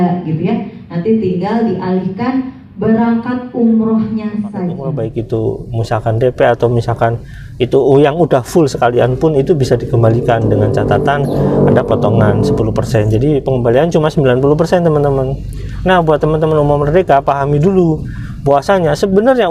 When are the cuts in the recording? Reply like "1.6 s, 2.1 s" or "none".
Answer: 4.9 s

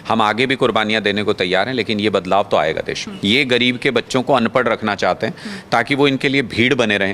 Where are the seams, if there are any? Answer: 3.1 s

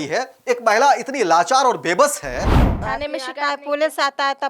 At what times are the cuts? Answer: 2.7 s

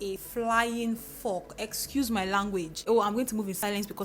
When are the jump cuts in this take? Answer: 2.9 s

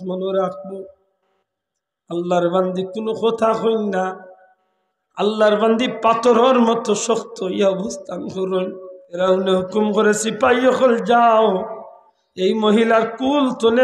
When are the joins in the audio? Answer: 9.2 s

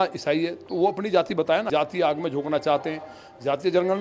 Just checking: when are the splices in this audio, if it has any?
1.7 s

